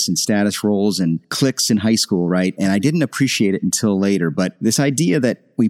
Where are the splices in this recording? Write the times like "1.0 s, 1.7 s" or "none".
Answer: none